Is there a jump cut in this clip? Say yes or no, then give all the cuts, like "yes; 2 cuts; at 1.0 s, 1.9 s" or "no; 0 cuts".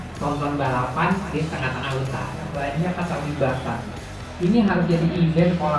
yes; 1 cut; at 2.5 s